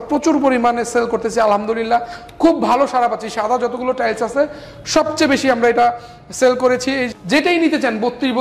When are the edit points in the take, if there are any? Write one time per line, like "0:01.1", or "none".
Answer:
0:07.1